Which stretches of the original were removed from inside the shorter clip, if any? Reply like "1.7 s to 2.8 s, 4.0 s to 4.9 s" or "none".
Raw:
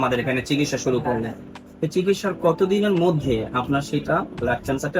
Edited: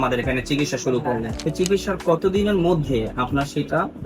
1.3 s to 1.7 s